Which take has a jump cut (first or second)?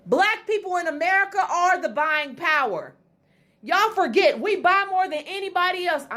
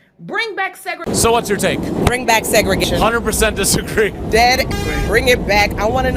second